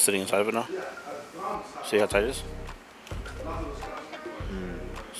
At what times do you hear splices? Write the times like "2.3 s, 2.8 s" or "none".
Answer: none

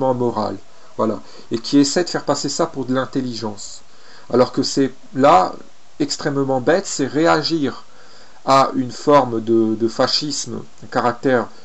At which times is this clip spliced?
5.3 s

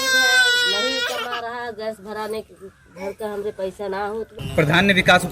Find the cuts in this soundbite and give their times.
4.4 s

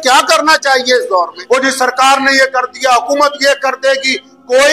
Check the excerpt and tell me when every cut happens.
1.4 s

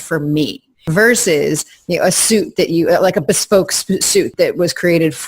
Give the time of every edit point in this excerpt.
0.9 s, 4.3 s

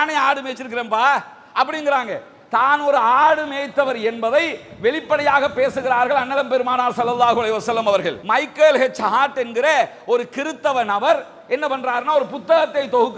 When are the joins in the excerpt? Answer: 8.2 s

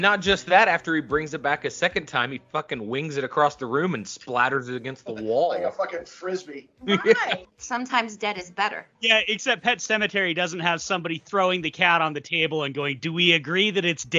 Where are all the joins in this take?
7.5 s, 8.9 s

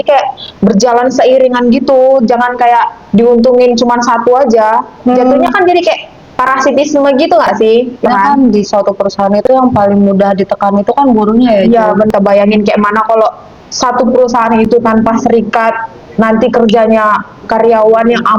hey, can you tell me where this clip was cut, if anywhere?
8.0 s, 12.1 s

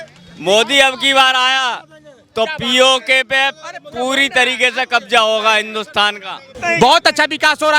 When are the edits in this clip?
6.5 s

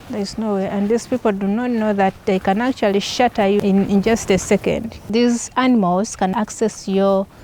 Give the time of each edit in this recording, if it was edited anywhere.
3.6 s, 5.0 s, 6.3 s

